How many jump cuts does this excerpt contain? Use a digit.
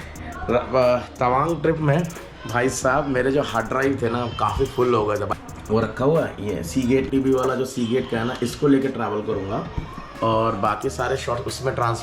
2